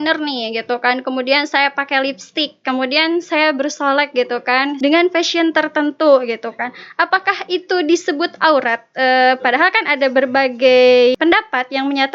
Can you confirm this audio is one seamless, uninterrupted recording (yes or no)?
no